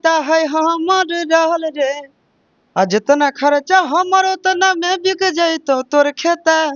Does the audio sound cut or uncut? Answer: uncut